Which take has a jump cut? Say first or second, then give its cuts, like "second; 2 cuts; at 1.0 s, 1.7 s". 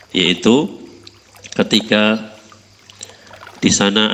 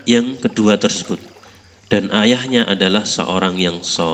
second; 1 cut; at 1.2 s